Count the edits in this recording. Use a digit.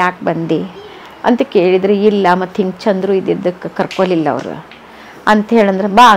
0